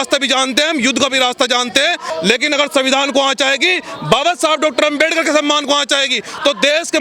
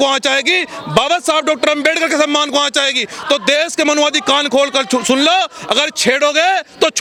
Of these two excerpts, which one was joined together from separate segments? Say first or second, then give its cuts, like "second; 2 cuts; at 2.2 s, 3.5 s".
first; 1 cut; at 2.1 s